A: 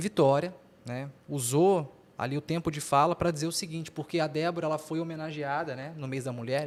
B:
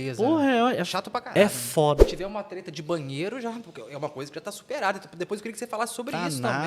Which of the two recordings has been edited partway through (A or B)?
B